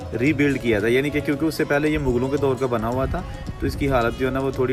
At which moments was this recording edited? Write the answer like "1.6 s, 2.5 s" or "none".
none